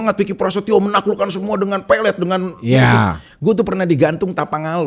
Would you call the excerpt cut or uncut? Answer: uncut